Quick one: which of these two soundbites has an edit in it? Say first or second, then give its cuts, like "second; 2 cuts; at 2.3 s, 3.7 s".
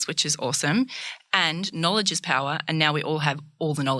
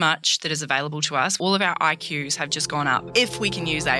second; 2 cuts; at 1.3 s, 3.1 s